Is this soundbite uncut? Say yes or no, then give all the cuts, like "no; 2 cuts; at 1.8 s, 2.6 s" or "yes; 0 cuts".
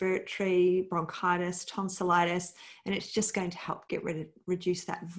yes; 0 cuts